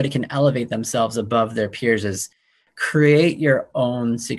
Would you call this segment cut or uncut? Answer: uncut